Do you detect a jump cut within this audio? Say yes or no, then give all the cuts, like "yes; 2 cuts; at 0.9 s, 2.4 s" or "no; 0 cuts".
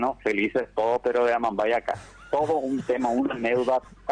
no; 0 cuts